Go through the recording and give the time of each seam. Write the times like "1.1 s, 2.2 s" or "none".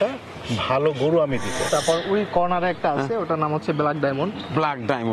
1.7 s